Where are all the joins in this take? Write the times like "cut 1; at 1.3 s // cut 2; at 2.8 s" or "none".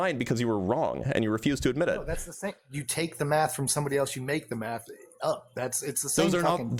none

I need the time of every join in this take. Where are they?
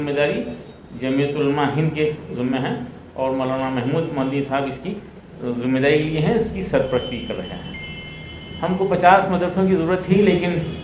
none

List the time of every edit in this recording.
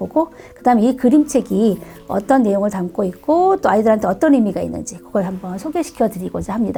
none

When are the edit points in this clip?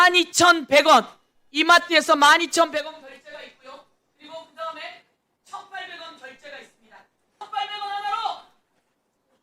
cut 1; at 7.4 s

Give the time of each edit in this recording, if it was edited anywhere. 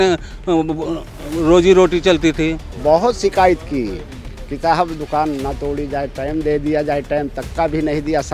cut 1; at 2.6 s

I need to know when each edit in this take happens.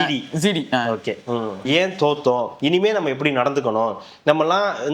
cut 1; at 1.6 s

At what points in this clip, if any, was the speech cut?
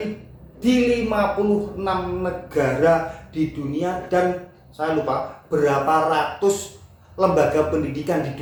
none

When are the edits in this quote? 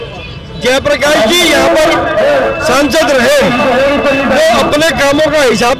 none

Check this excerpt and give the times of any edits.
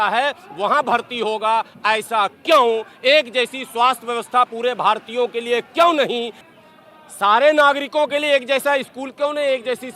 cut 1; at 6.5 s

